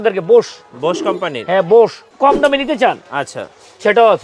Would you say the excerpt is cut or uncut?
cut